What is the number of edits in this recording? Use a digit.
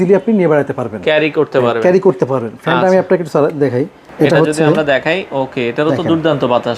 1